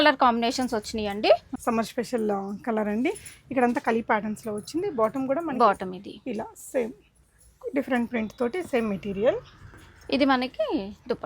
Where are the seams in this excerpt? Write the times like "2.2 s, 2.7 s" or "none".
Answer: 1.5 s